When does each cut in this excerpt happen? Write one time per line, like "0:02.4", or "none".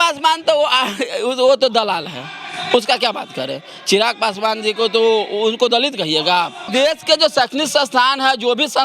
0:06.6